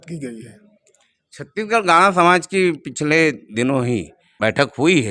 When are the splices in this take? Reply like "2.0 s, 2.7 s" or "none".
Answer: 4.2 s